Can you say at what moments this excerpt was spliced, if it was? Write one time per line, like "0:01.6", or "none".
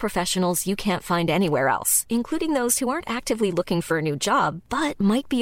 none